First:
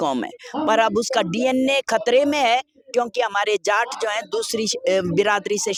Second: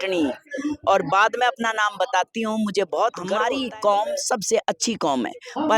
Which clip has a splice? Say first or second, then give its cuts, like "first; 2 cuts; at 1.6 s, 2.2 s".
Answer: second; 1 cut; at 3.4 s